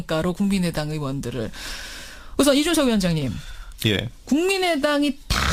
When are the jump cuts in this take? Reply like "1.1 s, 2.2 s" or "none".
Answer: none